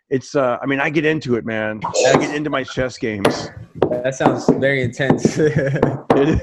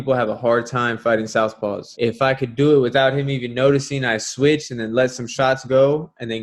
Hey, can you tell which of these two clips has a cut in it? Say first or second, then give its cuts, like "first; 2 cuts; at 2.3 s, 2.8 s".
second; 1 cut; at 1.9 s